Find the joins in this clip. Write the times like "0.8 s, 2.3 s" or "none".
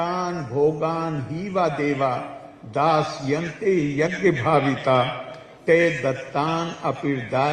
none